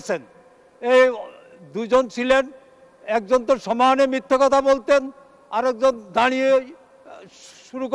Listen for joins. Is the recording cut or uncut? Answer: uncut